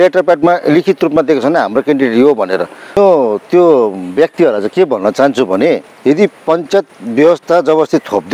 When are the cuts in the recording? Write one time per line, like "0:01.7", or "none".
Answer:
0:03.0
0:05.9